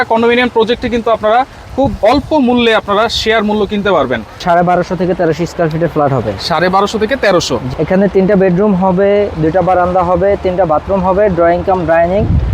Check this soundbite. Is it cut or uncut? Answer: cut